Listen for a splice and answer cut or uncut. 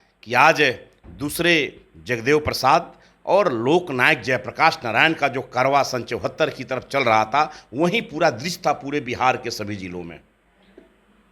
uncut